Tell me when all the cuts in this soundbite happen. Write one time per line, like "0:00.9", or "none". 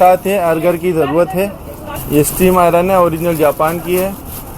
0:02.0